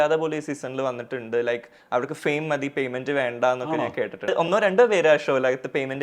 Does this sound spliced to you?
yes; 1 cut; at 4.3 s

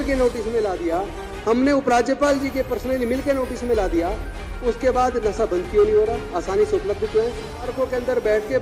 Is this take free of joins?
no; 1 cut; at 7.7 s

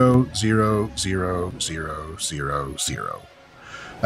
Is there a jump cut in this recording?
no; 0 cuts

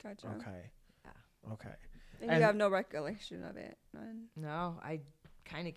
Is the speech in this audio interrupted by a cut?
no; 0 cuts

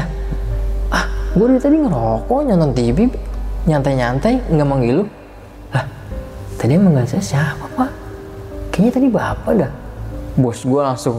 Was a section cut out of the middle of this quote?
no; 0 cuts

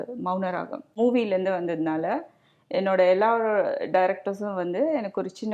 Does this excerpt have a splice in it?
yes; 1 cut; at 1.0 s

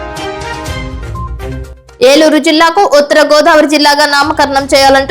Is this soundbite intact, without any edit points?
no; 1 cut; at 1.5 s

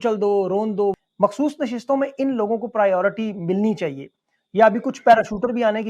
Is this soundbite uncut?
no; 1 cut; at 0.9 s

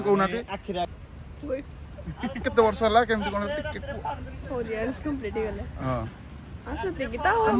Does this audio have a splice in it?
yes; 2 cuts; at 0.9 s, 2.4 s

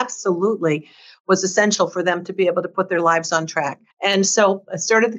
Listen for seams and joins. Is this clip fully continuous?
no; 1 cut; at 3.8 s

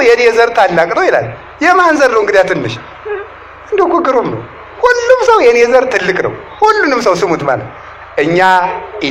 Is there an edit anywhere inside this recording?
no; 0 cuts

